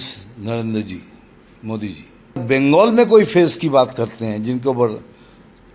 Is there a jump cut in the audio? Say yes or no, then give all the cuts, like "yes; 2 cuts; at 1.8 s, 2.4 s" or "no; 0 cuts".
yes; 1 cut; at 2.4 s